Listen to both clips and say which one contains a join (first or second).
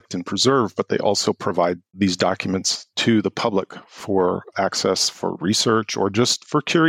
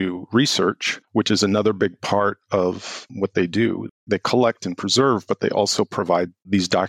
second